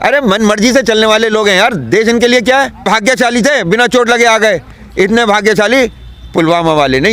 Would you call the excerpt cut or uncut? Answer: cut